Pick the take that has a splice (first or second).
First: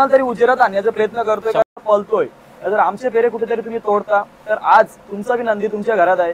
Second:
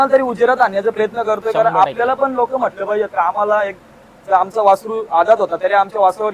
first